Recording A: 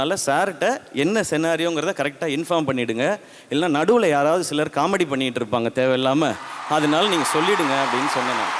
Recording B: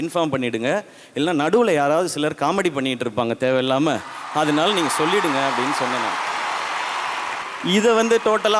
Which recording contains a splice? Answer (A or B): B